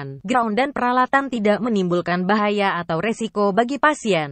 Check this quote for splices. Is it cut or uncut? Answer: uncut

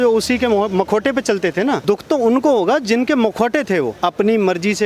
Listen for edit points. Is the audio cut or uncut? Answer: cut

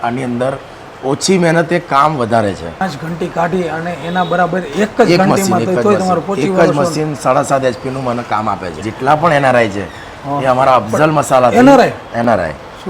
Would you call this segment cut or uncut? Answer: cut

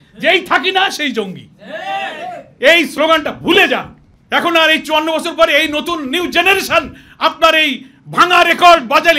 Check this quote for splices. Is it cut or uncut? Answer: uncut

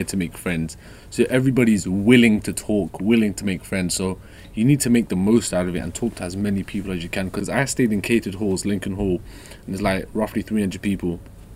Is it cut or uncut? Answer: uncut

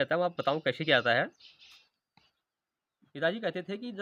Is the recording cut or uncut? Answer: uncut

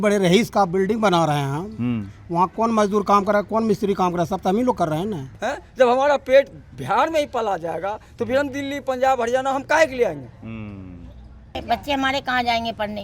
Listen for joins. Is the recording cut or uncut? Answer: cut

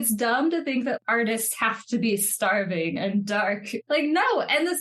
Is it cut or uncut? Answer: cut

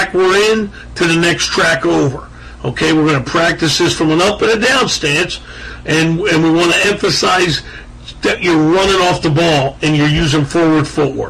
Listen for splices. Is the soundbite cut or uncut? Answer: uncut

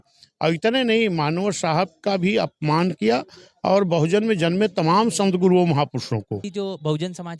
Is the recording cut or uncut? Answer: cut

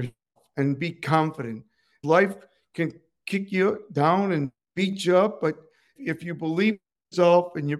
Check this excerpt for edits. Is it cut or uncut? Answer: cut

